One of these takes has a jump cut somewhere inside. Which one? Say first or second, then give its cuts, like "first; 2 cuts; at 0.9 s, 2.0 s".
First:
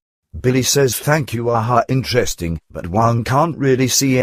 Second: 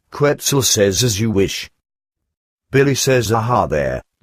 second; 1 cut; at 0.9 s